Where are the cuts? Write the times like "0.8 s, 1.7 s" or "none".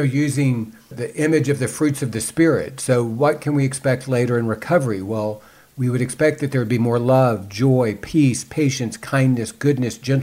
0.9 s, 8.0 s